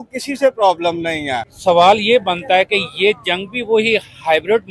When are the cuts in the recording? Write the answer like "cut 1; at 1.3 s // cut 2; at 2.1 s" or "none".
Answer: cut 1; at 1.4 s

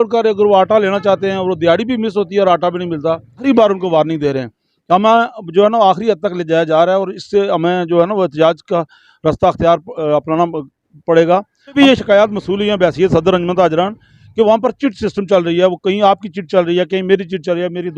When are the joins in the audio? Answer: cut 1; at 3.4 s // cut 2; at 11.7 s

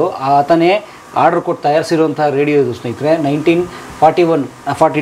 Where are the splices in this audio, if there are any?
none

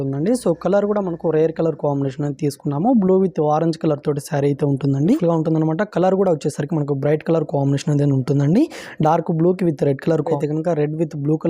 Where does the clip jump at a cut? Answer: cut 1; at 5.0 s // cut 2; at 10.3 s

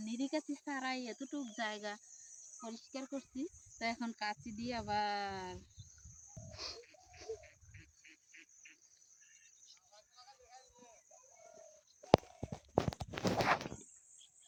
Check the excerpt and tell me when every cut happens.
none

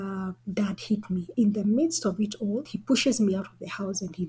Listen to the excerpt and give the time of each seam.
cut 1; at 1.3 s // cut 2; at 2.7 s

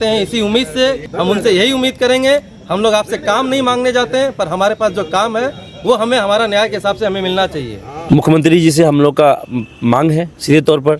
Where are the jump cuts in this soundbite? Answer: cut 1; at 1.0 s // cut 2; at 7.9 s

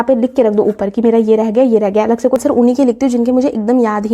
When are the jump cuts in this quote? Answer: cut 1; at 2.4 s

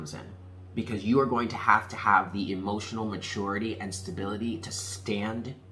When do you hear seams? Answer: none

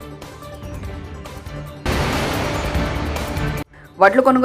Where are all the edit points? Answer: none

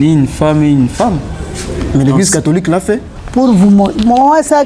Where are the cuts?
cut 1; at 3.1 s

